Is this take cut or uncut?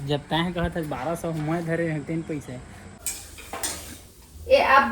cut